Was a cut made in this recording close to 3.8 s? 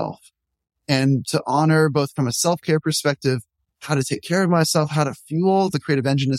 yes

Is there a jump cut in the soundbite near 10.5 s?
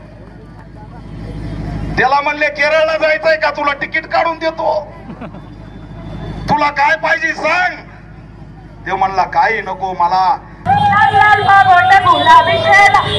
yes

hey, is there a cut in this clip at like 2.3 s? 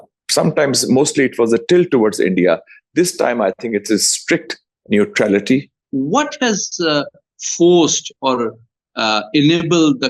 no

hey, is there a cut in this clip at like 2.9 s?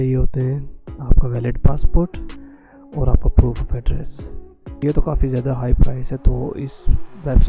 no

